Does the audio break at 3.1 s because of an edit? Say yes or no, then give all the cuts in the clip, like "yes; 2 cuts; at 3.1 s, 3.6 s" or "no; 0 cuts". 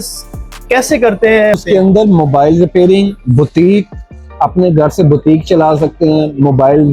no; 1 cut; at 1.6 s